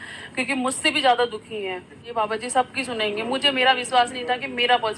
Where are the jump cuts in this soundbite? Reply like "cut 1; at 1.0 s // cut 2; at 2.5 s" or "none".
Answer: cut 1; at 2.1 s